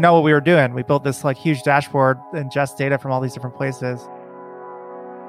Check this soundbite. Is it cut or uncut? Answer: uncut